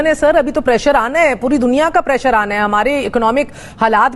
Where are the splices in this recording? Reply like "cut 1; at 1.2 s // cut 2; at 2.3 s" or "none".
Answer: none